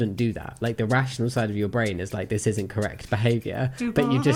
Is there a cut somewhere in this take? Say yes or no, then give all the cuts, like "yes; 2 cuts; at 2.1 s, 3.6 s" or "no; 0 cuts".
no; 0 cuts